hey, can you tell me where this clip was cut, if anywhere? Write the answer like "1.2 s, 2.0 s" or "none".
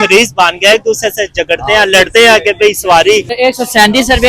3.3 s